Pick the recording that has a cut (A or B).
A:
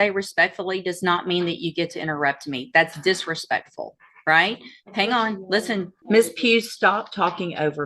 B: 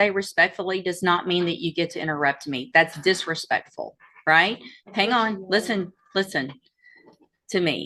A